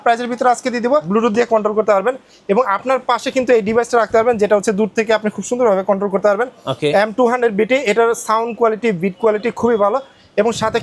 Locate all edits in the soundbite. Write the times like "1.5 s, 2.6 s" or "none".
1.1 s